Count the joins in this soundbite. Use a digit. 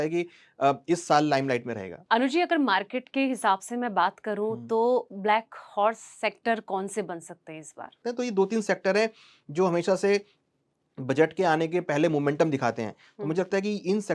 2